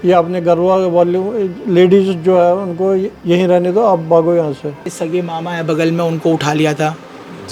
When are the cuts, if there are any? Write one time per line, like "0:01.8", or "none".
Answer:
0:04.9